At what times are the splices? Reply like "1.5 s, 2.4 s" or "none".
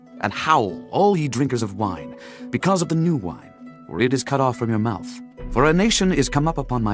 none